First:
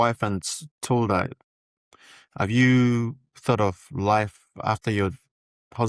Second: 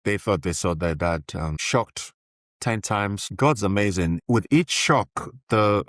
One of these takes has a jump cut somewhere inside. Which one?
second; 3 cuts; at 1.6 s, 3.2 s, 4.2 s

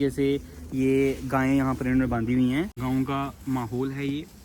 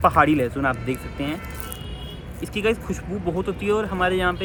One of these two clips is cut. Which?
first; 1 cut; at 2.8 s

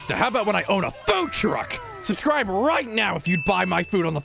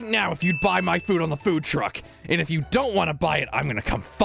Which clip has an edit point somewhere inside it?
first; 1 cut; at 1.8 s

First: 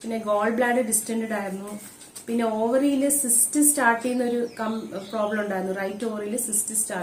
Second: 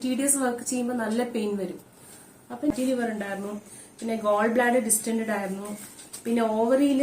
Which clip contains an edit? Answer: second; 1 cut; at 2.7 s

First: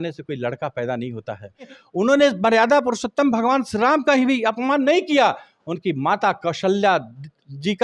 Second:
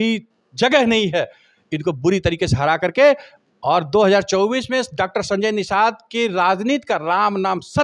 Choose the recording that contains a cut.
first; 1 cut; at 1.8 s

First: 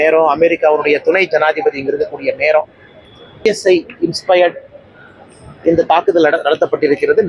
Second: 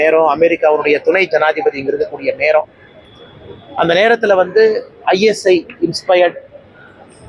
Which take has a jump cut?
first; 1 cut; at 3.4 s

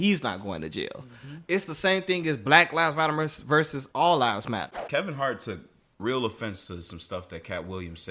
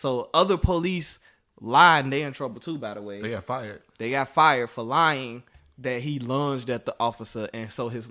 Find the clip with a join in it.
first; 3 cuts; at 1.3 s, 3.8 s, 4.7 s

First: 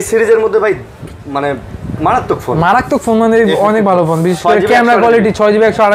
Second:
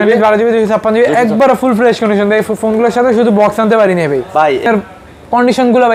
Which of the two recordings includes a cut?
second; 1 cut; at 4.7 s

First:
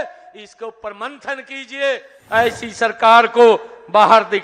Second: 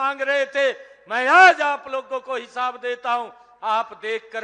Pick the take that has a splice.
first; 1 cut; at 2.1 s

